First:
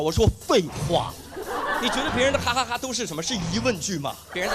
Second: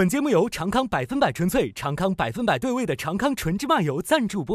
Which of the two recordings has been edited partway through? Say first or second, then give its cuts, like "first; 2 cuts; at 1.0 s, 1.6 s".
first; 1 cut; at 1.8 s